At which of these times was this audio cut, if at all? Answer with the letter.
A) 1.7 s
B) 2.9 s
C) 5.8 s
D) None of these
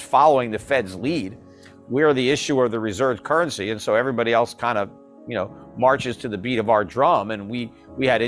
D